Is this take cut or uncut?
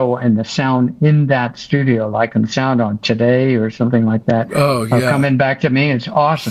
uncut